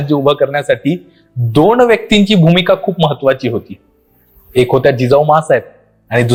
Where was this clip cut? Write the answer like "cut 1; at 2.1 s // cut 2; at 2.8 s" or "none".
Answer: none